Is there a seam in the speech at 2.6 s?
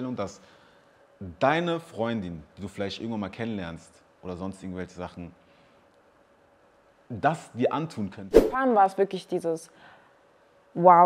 no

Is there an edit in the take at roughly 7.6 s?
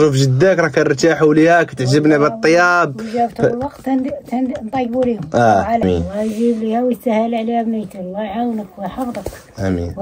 no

